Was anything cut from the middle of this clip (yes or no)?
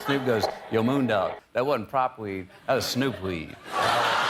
no